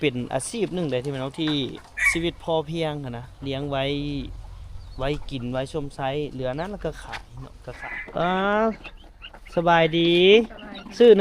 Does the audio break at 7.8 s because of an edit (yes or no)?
yes